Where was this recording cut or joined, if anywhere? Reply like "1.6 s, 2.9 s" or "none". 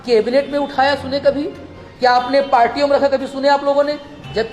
none

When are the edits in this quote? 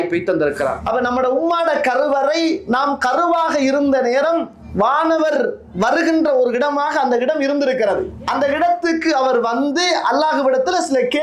0.8 s, 8.2 s

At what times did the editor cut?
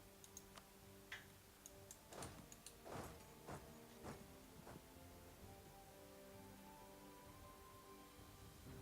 4.6 s

